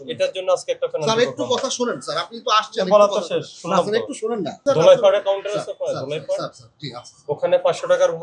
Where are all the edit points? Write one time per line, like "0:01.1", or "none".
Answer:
0:04.6